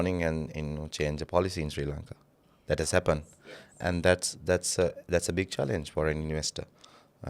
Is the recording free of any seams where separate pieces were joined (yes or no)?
yes